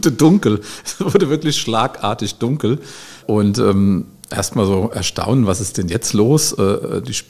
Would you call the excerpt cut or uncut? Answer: uncut